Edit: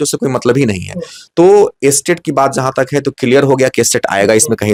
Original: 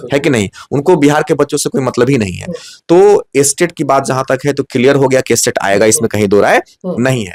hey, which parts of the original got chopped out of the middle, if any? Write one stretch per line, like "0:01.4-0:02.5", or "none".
none